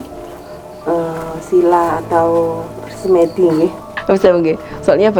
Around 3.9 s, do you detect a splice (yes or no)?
yes